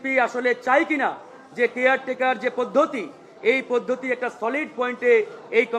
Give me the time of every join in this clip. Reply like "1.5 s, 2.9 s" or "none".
none

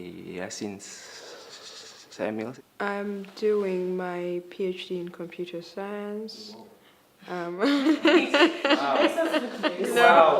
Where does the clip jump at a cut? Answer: 1.7 s

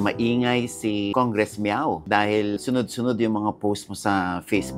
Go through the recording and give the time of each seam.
1.1 s, 2.6 s

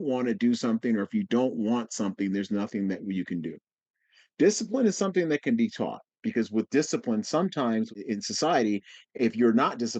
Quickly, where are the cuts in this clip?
6.2 s, 8.0 s

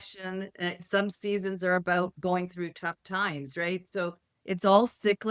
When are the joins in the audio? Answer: none

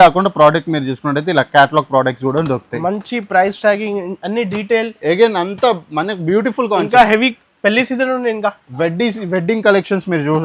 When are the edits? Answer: none

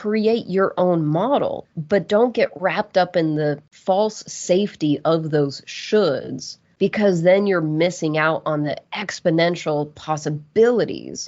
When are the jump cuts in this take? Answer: 1.6 s

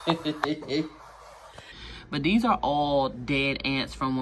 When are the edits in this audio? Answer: 1.8 s

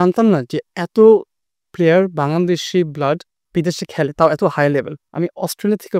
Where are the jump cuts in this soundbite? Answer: 3.3 s, 5.0 s

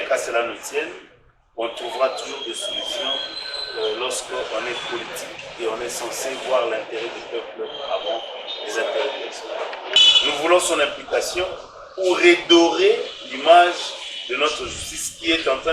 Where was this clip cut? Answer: 9.9 s

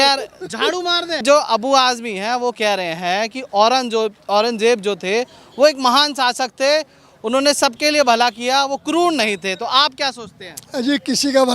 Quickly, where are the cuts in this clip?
1.2 s

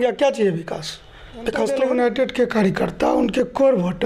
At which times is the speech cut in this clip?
1.7 s

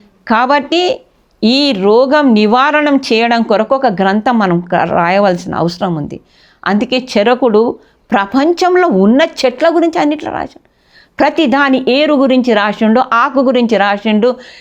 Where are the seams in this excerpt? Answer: none

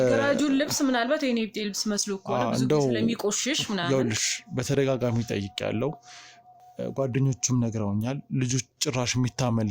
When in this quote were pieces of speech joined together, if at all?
none

